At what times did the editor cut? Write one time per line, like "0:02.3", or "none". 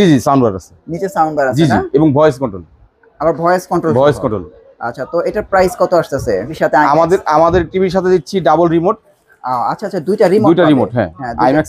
0:06.5